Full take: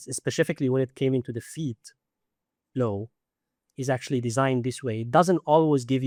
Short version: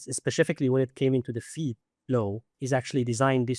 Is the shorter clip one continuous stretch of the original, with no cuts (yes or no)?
no